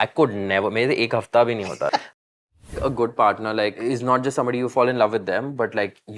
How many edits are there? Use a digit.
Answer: 3